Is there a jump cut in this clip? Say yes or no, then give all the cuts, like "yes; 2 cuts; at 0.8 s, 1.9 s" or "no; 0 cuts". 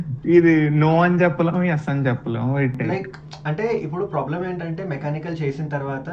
yes; 1 cut; at 2.8 s